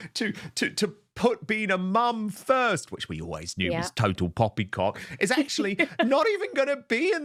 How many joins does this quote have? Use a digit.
0